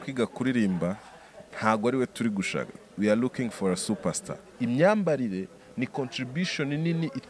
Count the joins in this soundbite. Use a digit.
1